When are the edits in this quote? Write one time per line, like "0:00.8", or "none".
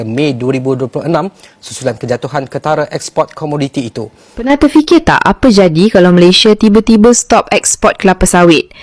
0:04.5